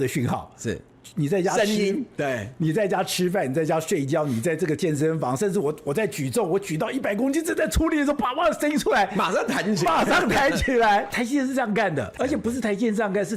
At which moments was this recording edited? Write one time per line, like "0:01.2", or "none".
0:11.1
0:12.1